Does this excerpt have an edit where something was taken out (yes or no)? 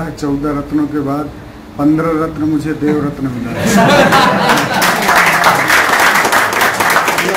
no